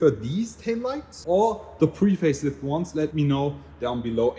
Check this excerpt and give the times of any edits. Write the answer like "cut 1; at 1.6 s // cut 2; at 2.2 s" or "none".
none